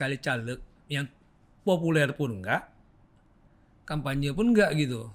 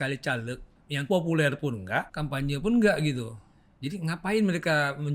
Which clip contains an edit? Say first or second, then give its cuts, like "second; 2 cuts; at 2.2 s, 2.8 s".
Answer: second; 2 cuts; at 1.0 s, 2.2 s